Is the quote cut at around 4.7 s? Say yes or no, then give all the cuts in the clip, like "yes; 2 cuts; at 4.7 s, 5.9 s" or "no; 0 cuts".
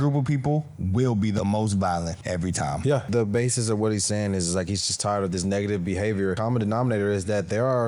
no; 3 cuts; at 1.4 s, 3.1 s, 6.4 s